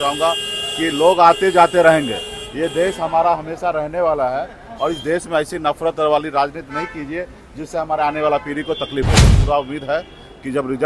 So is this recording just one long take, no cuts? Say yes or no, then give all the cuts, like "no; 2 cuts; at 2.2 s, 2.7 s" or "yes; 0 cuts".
no; 1 cut; at 9.2 s